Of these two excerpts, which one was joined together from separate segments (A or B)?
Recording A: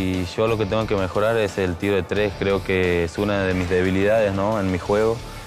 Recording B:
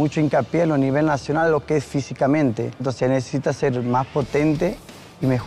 B